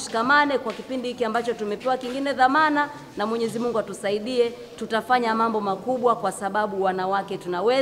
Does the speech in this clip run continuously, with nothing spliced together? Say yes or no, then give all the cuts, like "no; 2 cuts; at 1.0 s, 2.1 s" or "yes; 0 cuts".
yes; 0 cuts